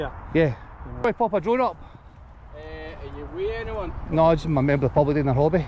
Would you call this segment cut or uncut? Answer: cut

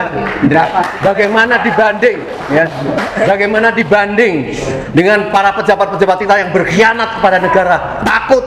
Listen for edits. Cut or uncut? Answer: uncut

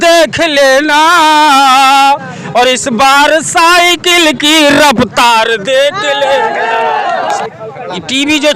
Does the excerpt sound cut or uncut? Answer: cut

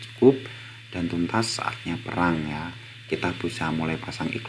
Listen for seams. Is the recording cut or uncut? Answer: uncut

